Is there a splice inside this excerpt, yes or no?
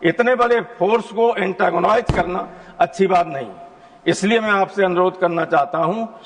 no